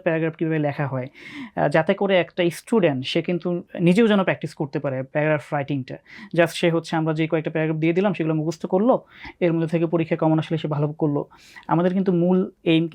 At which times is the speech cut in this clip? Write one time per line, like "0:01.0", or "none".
none